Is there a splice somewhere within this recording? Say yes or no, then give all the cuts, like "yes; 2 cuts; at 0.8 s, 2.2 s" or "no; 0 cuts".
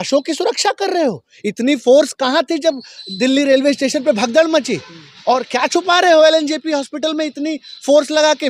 no; 0 cuts